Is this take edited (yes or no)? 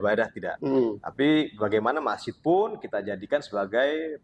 no